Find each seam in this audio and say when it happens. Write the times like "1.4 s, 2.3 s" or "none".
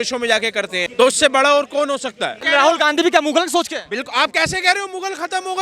0.9 s, 2.4 s